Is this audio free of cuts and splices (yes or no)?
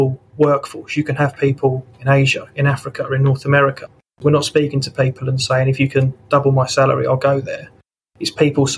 no